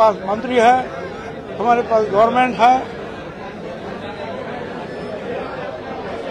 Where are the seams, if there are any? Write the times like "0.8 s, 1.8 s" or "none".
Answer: none